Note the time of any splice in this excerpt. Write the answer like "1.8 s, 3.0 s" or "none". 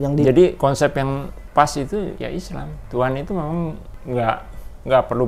1.3 s, 2.3 s, 3.9 s

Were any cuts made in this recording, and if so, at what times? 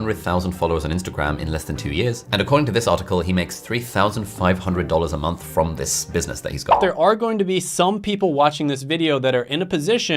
6.8 s

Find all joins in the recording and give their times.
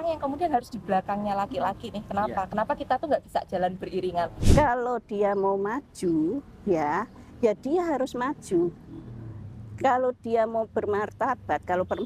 4.4 s

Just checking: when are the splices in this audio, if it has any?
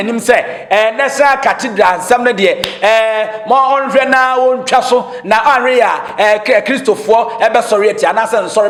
none

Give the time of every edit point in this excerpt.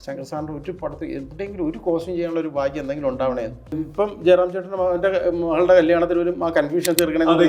3.8 s

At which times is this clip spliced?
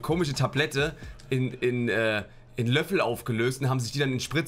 none

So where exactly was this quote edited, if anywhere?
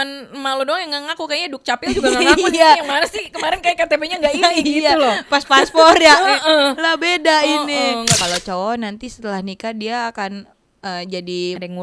8.2 s

